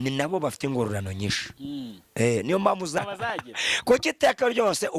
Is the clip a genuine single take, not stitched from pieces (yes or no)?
no